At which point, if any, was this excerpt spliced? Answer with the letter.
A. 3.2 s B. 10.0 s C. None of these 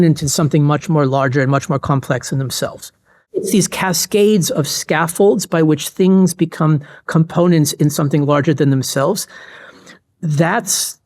A